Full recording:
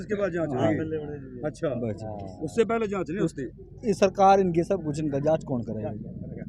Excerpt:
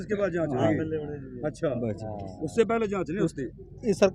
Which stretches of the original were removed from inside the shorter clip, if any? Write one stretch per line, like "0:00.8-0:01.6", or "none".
none